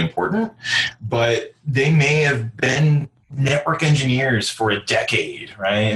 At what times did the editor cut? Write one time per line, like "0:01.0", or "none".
none